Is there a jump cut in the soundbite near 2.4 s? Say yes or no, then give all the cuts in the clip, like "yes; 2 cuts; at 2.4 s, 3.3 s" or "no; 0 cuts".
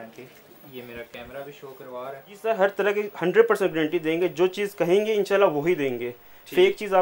yes; 1 cut; at 2.4 s